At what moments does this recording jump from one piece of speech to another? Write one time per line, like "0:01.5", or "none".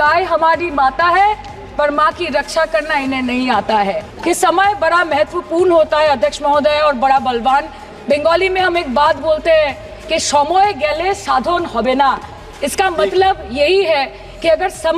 0:04.1